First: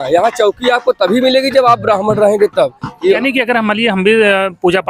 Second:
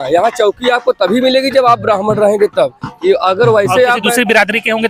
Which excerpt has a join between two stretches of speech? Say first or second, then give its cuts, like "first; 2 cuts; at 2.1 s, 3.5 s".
first; 1 cut; at 3.2 s